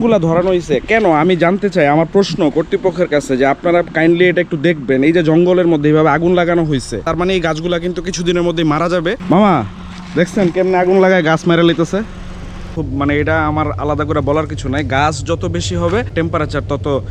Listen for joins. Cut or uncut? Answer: cut